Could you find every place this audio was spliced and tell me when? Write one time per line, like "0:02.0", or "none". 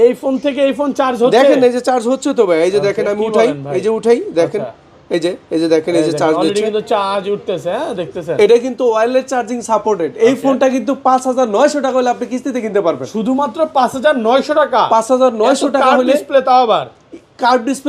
none